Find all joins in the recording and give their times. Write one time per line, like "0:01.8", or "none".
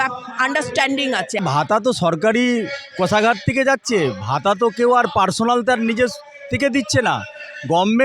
0:01.4